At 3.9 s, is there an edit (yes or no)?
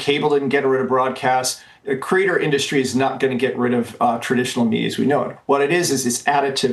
no